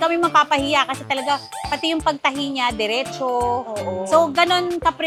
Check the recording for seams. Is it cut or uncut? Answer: uncut